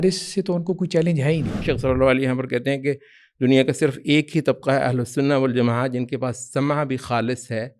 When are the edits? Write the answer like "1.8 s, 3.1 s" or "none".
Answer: 1.6 s